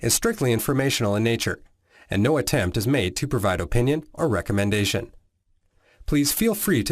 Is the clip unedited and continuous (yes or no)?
yes